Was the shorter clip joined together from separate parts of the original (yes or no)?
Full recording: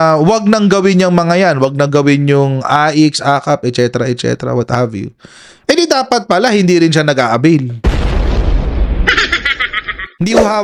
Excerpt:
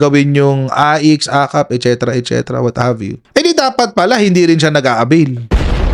yes